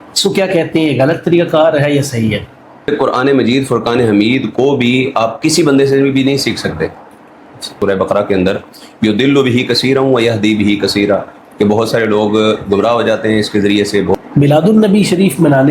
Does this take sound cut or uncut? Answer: cut